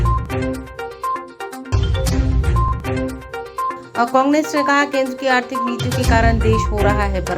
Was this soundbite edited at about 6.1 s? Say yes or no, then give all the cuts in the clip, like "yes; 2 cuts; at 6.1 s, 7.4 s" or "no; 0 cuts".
no; 1 cut; at 1.1 s